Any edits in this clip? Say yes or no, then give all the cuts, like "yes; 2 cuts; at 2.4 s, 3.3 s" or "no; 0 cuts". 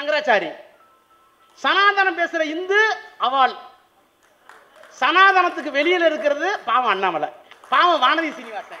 yes; 1 cut; at 7.5 s